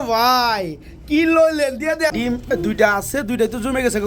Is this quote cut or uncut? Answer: cut